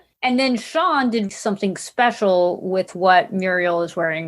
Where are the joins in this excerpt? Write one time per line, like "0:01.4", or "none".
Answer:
0:01.3